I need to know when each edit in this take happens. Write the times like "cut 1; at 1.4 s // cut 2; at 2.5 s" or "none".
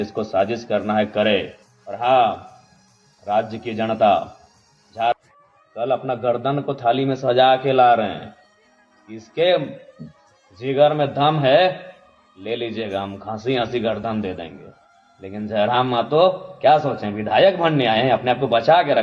cut 1; at 5.2 s